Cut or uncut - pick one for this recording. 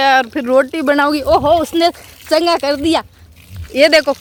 uncut